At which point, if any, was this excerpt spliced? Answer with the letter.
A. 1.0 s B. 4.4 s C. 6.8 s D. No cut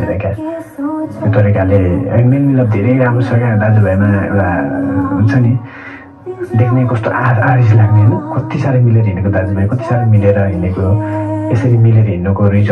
D